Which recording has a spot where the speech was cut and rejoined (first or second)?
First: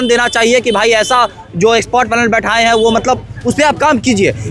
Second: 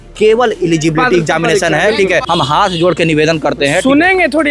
second